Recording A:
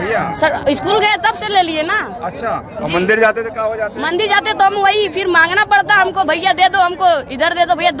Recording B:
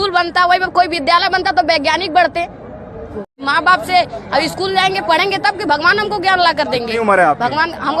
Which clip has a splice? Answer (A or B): B